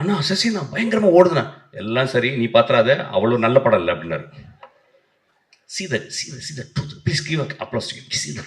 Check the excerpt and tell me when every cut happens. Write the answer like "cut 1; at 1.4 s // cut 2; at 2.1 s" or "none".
none

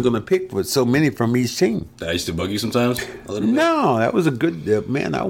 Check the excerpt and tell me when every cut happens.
cut 1; at 1.9 s

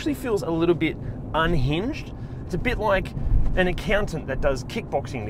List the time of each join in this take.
none

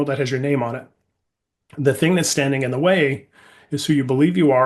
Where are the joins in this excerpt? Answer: none

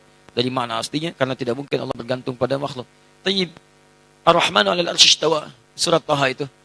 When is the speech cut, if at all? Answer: none

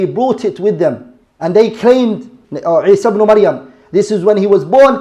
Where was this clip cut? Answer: cut 1; at 2.3 s

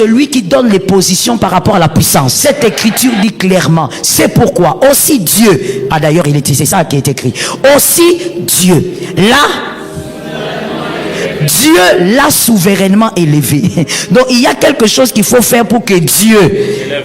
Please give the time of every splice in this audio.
cut 1; at 2.3 s

